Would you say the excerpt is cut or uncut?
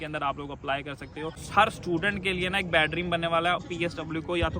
cut